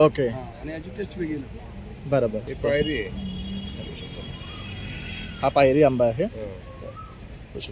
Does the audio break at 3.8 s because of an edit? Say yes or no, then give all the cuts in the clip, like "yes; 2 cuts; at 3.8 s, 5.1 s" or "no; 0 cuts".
no; 1 cut; at 2.4 s